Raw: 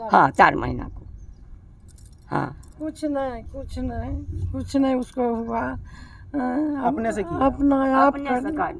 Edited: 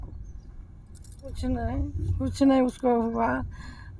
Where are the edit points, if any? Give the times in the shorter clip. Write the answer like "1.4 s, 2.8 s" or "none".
1.2 s